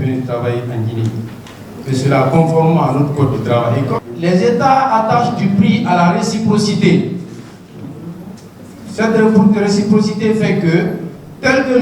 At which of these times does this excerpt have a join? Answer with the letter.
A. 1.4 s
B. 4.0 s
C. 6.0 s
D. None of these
B